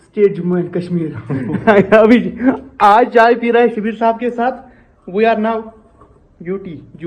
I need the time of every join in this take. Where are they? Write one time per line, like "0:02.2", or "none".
none